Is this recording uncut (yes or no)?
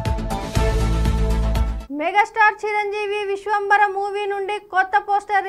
yes